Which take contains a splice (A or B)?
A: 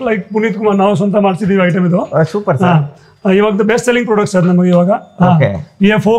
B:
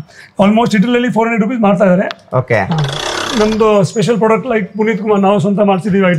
B